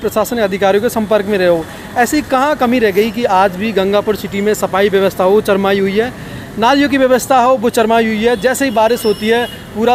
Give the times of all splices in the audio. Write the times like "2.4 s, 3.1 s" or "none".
none